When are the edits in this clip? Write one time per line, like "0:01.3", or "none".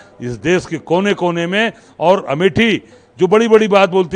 0:03.0

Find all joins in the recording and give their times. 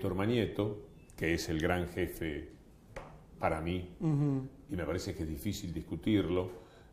0:04.1

